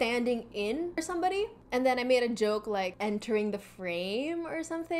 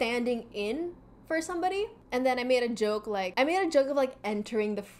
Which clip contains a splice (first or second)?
first